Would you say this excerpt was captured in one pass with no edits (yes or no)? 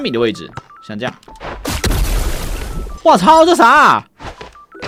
yes